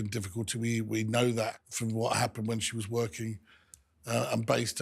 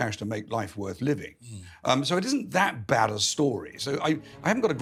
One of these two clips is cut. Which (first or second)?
first